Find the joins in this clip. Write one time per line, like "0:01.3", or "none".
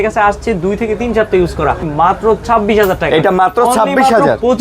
0:01.8